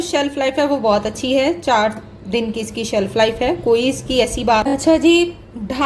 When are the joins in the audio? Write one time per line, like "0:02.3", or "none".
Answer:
0:04.7

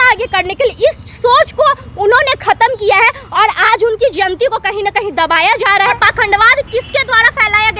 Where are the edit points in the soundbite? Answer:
0:05.9

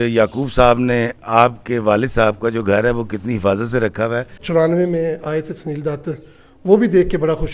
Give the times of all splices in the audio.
0:04.4

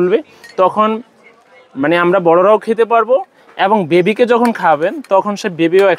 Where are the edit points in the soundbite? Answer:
none

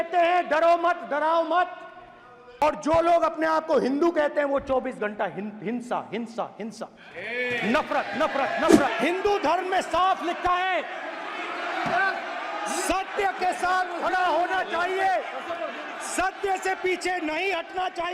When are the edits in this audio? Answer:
0:02.6
0:08.9

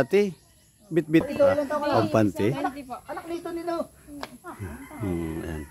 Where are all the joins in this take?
0:01.3

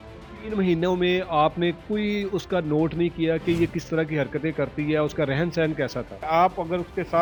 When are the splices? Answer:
none

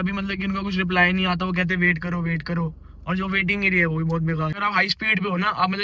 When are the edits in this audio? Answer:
0:04.5

